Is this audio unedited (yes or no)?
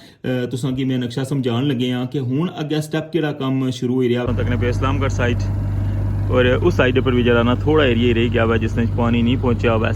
no